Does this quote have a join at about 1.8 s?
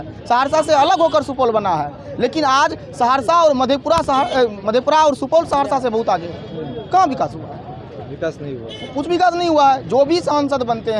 no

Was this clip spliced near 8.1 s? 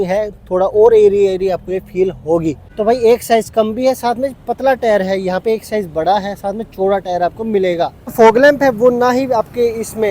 yes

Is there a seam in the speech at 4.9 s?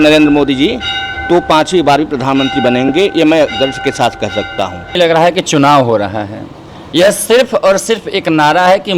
yes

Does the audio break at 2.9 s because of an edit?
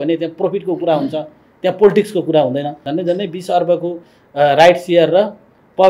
yes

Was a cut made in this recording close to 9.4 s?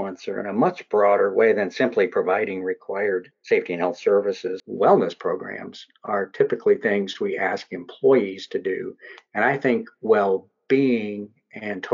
no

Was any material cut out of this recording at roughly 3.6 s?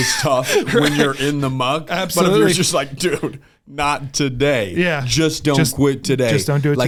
no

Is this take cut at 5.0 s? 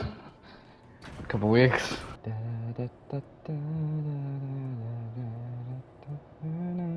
no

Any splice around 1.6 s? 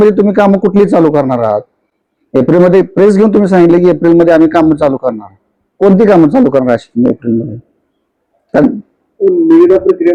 no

